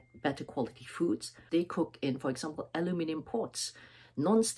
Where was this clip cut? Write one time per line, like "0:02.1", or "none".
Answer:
0:01.3

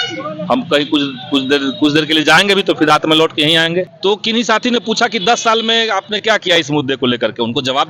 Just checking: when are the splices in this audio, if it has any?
0:03.9

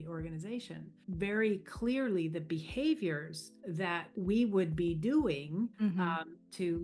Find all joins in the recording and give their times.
0:01.0
0:03.9
0:05.7

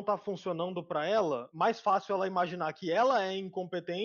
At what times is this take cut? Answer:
0:01.5

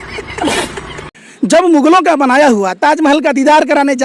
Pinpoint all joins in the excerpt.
0:01.1

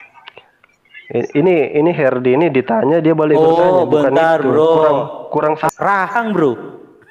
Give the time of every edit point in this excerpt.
0:05.7

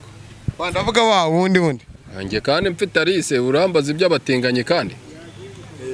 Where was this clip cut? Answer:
none

